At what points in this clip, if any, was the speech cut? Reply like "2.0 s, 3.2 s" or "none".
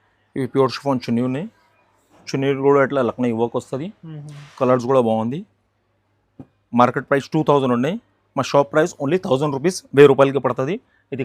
none